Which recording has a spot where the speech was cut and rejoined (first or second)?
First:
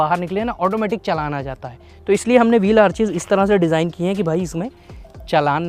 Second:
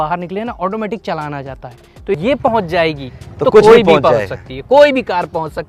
second